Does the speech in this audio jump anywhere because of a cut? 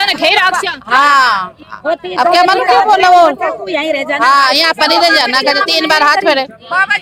no; 0 cuts

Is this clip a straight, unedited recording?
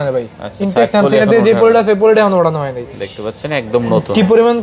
yes; 0 cuts

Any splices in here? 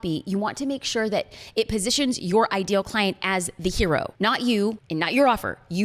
no; 0 cuts

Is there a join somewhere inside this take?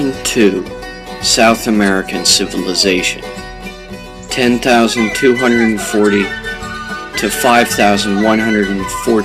no; 0 cuts

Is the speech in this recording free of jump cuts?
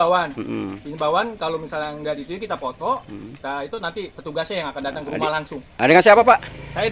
yes; 0 cuts

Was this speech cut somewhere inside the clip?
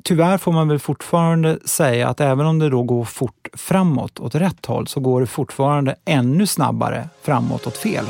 no; 0 cuts

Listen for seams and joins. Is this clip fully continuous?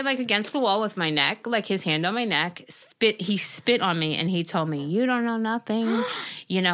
yes; 0 cuts

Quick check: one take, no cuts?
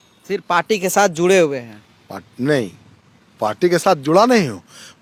yes; 0 cuts

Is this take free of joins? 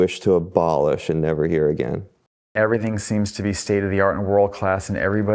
no; 1 cut; at 2.5 s

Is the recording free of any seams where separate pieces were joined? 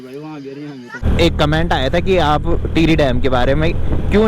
no; 1 cut; at 1.0 s

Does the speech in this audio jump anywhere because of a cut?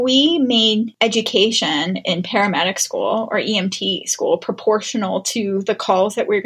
yes; 1 cut; at 0.9 s

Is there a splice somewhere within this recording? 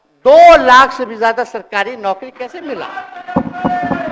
no; 0 cuts

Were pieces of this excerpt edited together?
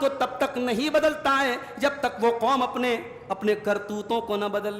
no; 0 cuts

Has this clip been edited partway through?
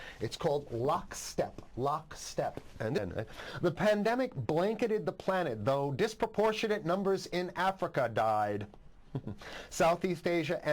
yes; 1 cut; at 3.0 s

